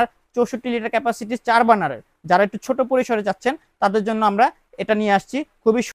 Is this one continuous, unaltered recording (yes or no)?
yes